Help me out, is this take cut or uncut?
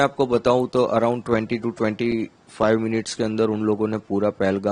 uncut